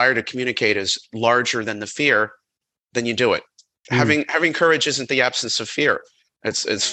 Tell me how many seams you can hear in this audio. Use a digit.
2